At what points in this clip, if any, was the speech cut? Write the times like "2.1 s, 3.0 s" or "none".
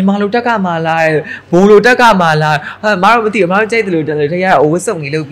none